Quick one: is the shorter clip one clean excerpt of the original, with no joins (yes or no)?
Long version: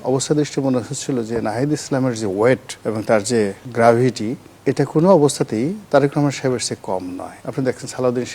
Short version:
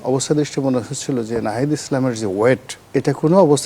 no